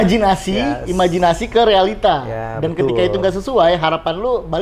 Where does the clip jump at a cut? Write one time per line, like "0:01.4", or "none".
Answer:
none